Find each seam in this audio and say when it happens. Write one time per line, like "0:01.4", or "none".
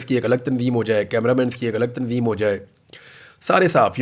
none